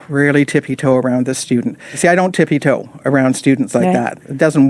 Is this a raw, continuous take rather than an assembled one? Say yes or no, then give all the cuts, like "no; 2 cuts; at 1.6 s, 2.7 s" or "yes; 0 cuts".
no; 1 cut; at 1.9 s